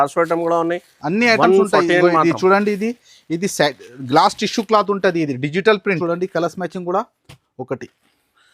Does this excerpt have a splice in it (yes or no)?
yes